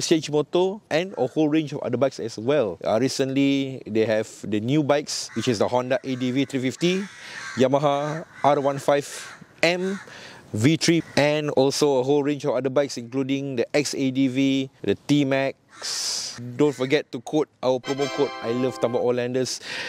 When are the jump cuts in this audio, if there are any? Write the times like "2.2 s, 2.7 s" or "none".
2.8 s